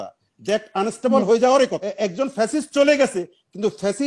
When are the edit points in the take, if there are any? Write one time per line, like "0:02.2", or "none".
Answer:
0:01.8